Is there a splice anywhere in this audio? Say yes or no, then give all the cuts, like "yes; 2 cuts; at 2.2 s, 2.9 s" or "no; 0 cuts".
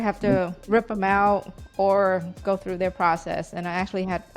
yes; 1 cut; at 2.4 s